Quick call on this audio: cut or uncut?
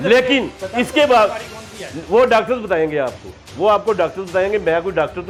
uncut